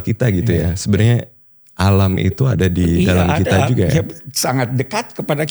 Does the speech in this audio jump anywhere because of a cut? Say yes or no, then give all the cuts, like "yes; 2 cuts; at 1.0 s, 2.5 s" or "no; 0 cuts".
no; 0 cuts